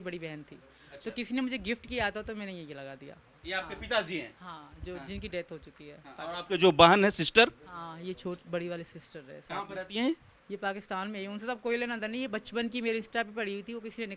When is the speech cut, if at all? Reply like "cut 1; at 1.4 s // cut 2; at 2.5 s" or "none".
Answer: none